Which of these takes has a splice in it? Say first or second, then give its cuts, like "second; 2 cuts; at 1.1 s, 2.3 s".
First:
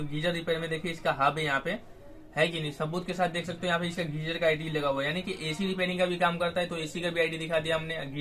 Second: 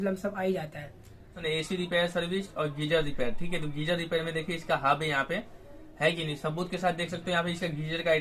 second; 1 cut; at 1.4 s